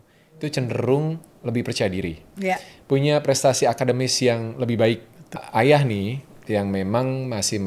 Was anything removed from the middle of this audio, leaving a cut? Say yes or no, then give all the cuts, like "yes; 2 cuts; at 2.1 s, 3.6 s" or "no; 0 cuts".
yes; 1 cut; at 5.4 s